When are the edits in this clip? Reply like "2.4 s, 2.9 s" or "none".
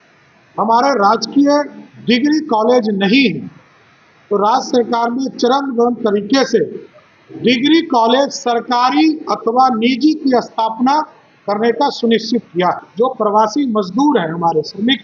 12.9 s